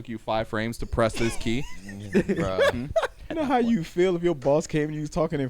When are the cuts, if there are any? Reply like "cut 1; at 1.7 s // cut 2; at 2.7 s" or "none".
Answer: cut 1; at 3.2 s